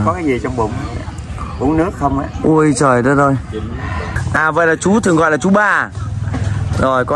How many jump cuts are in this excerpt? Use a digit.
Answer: 1